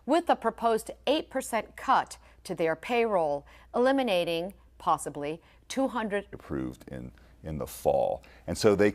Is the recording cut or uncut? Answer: uncut